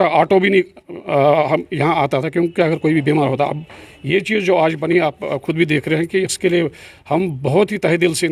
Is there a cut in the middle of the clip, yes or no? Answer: no